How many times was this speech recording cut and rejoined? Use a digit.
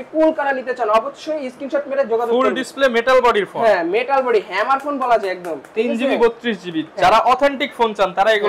0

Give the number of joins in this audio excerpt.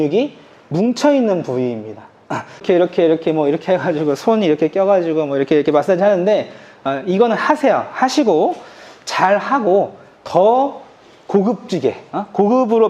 1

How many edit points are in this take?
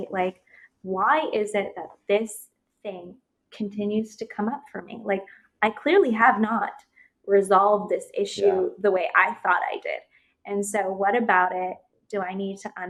0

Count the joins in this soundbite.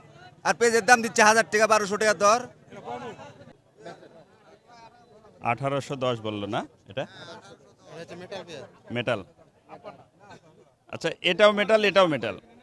1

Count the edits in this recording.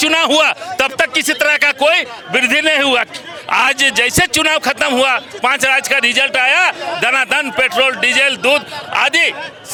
0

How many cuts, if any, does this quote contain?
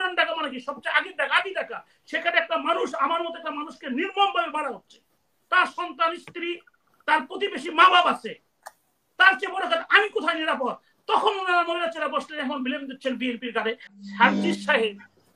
1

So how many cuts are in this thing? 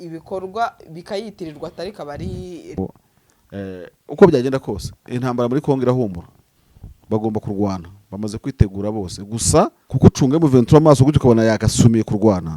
2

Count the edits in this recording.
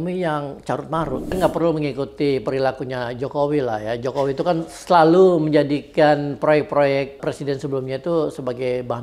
3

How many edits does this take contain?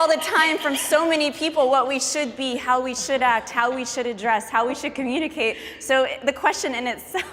0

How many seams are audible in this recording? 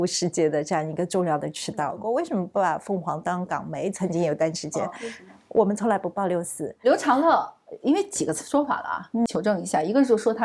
3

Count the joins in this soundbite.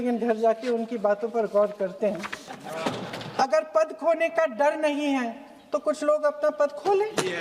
1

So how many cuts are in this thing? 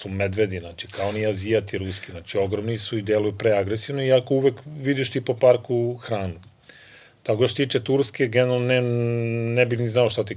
0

